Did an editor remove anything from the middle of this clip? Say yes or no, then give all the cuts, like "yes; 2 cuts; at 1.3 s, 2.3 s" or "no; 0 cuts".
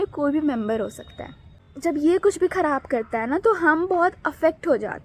yes; 1 cut; at 1.6 s